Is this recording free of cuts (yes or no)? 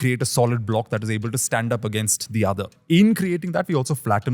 no